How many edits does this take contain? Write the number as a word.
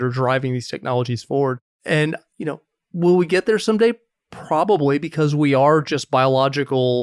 one